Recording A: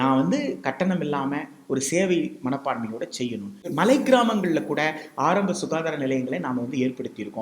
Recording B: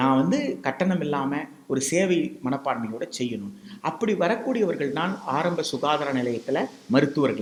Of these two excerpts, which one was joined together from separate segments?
A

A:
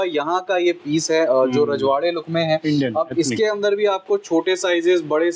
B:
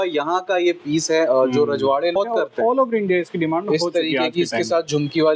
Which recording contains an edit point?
B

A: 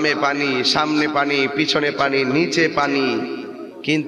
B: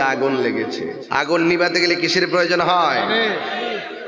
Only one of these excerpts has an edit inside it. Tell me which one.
B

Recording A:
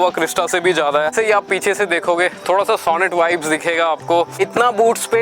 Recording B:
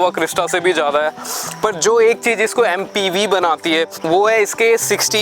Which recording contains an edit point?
A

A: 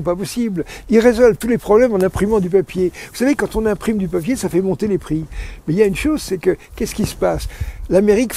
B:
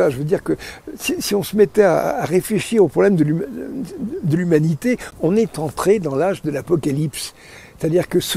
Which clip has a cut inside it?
B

